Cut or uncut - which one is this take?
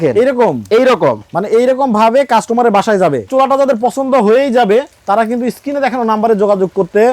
cut